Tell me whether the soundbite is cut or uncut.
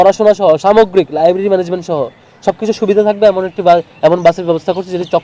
uncut